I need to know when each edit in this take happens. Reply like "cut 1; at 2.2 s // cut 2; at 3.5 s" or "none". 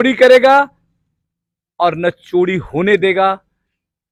none